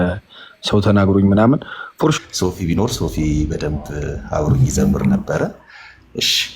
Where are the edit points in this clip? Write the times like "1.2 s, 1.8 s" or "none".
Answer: 2.1 s